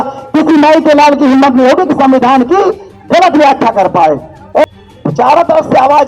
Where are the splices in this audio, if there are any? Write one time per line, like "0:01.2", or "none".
0:04.6